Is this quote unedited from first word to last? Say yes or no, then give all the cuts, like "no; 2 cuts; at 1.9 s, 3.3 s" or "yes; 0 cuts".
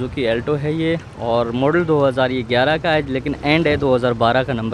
yes; 0 cuts